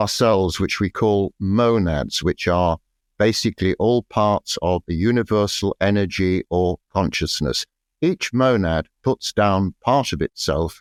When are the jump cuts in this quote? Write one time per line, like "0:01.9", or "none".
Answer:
none